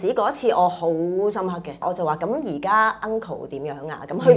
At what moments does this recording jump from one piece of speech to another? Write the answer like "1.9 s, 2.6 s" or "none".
1.8 s